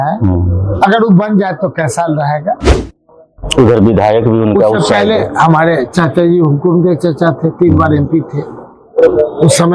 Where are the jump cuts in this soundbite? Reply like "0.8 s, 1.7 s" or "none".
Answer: 2.7 s